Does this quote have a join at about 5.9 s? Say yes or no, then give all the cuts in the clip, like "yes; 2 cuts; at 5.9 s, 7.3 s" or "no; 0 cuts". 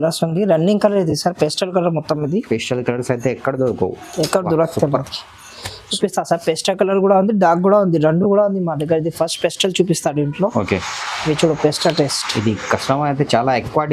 yes; 1 cut; at 5.9 s